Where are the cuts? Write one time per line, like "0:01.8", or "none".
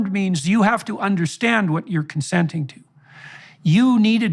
0:03.3